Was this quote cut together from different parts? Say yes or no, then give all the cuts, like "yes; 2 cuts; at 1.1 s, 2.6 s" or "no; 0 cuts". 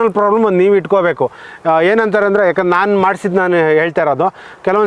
no; 0 cuts